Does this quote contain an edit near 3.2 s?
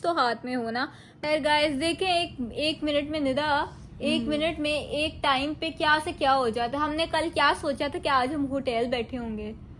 no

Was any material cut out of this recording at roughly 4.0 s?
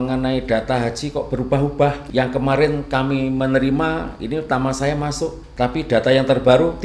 no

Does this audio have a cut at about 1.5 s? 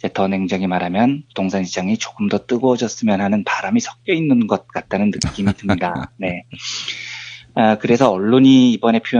yes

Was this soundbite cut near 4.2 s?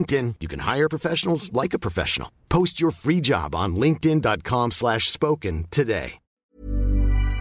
no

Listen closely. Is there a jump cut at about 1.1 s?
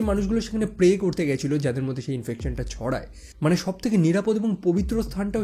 no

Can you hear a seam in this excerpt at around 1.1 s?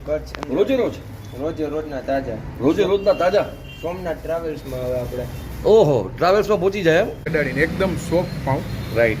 no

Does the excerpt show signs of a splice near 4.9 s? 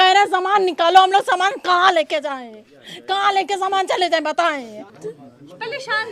yes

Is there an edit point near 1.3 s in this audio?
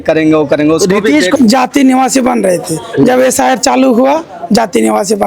yes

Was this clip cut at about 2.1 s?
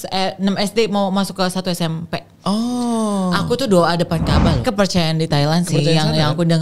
no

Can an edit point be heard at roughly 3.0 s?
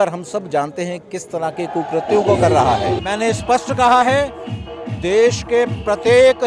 no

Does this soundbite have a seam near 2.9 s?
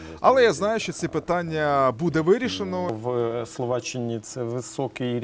yes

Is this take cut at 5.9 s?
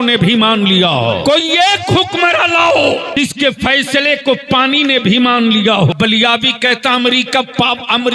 yes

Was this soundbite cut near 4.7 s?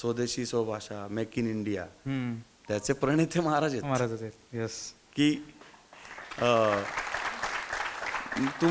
no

